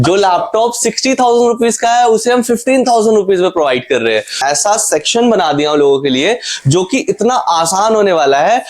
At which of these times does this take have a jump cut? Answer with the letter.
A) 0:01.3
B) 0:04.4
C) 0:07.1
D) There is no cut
B